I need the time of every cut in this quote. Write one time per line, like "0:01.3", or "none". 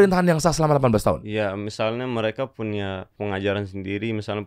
0:03.1